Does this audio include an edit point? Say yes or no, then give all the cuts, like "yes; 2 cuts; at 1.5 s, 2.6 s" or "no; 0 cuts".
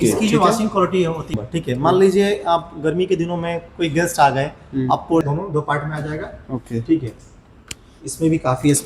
yes; 2 cuts; at 1.4 s, 5.2 s